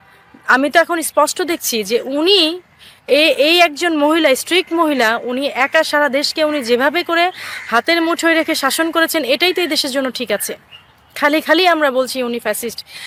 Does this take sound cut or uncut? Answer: uncut